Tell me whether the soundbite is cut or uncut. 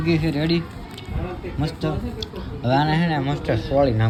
uncut